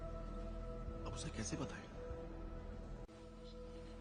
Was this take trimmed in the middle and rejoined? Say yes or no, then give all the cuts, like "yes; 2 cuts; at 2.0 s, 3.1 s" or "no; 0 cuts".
no; 0 cuts